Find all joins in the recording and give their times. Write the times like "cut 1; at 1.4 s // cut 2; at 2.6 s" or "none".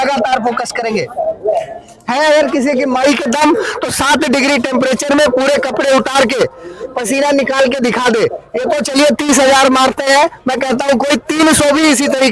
none